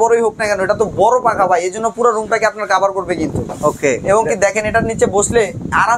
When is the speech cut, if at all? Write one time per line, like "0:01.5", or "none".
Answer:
none

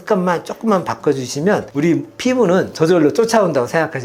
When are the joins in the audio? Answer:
none

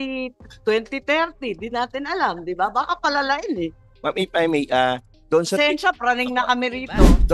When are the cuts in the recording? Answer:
none

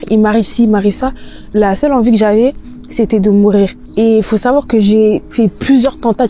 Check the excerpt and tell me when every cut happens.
0:01.4
0:03.8

